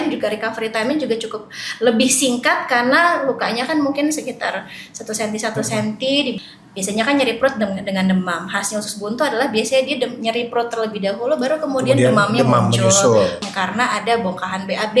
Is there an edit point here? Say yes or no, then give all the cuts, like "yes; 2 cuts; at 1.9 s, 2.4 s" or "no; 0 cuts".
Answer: yes; 2 cuts; at 6.4 s, 13.5 s